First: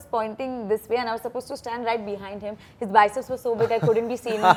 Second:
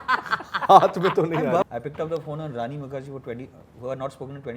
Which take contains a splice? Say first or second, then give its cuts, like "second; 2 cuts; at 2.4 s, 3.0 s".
second; 1 cut; at 1.6 s